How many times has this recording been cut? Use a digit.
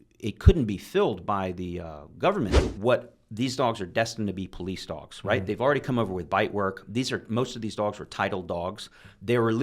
1